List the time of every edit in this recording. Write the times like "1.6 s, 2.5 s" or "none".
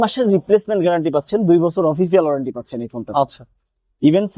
none